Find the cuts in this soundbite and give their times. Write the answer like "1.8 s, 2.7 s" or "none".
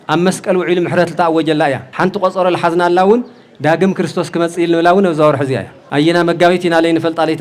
1.9 s, 5.7 s